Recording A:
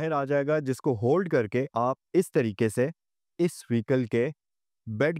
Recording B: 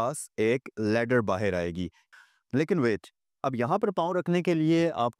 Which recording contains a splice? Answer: B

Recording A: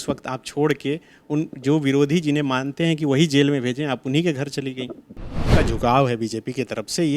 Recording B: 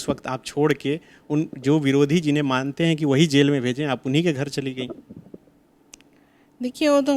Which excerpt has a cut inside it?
A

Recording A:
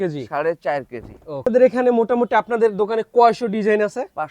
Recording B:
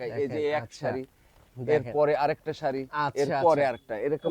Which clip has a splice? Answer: A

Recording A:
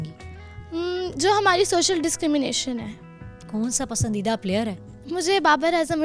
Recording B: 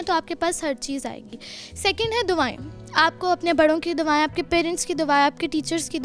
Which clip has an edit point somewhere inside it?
A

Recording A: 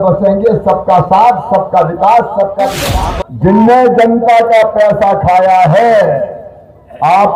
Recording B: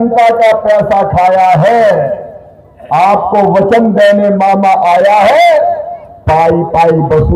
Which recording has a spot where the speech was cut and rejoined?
A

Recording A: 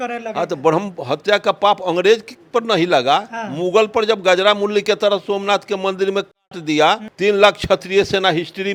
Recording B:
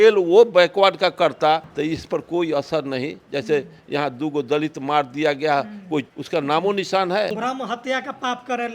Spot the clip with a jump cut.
B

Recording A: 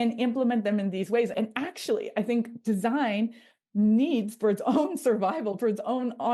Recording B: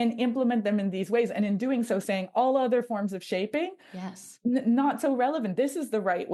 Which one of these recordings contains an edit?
A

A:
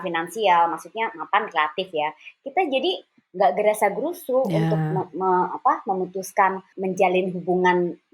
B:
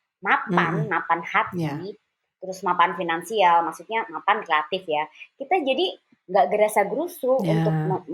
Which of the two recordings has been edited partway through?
A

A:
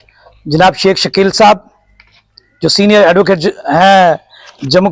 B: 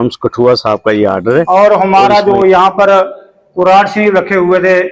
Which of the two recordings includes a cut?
B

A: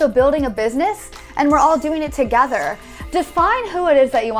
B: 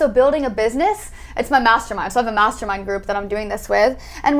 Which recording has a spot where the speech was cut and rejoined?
A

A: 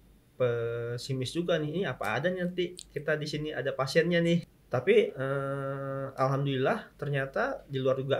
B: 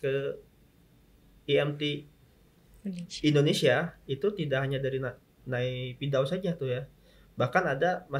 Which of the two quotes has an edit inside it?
A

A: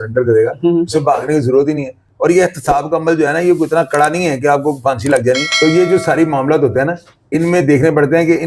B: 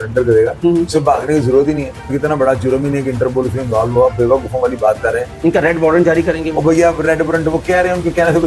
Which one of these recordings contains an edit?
B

